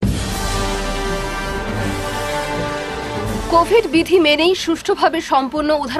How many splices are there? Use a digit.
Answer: 0